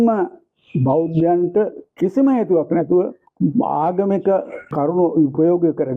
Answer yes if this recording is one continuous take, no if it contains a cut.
no